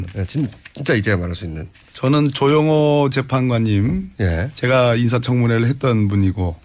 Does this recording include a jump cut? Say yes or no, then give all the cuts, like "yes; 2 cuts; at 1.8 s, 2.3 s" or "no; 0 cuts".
no; 0 cuts